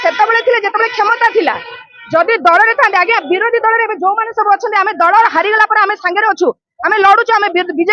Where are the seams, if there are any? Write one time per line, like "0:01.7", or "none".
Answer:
none